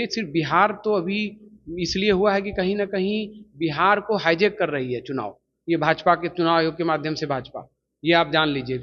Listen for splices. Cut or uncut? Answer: uncut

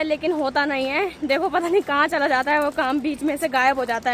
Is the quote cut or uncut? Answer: uncut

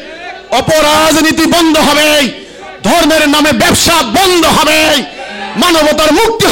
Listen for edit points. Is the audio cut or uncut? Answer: uncut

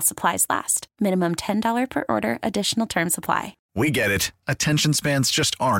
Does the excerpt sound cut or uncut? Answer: cut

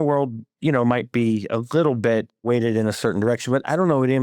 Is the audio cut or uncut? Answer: cut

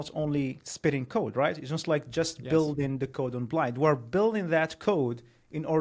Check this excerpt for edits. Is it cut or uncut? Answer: uncut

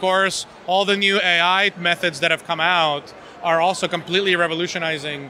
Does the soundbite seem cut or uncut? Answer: cut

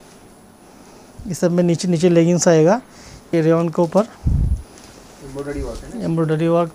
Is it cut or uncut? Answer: cut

